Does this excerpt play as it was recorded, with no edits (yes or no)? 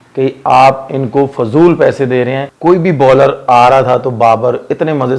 no